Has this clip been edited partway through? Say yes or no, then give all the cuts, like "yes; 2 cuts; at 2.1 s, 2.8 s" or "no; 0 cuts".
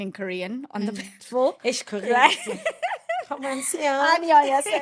no; 0 cuts